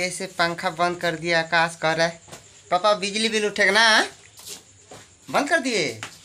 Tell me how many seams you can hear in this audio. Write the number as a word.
zero